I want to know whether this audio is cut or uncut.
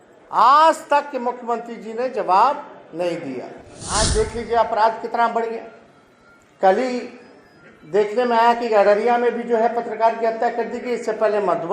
cut